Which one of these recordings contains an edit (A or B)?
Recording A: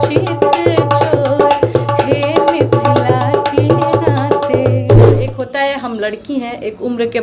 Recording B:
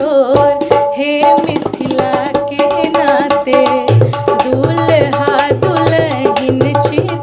A